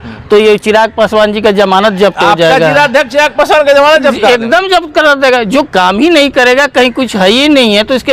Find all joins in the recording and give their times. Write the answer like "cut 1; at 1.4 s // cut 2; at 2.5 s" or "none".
none